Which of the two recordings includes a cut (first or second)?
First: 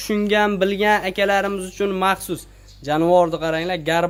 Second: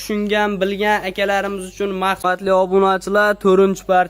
second